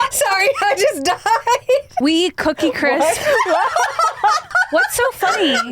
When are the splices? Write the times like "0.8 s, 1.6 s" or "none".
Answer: 1.9 s, 4.5 s